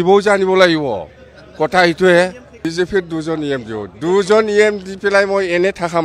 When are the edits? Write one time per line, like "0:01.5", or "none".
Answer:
0:02.5